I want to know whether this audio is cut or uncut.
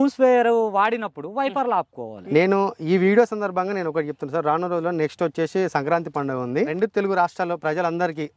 cut